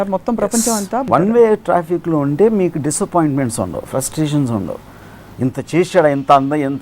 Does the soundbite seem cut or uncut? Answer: cut